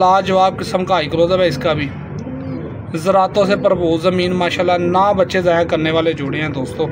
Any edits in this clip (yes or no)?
no